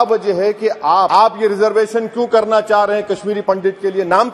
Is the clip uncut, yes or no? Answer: no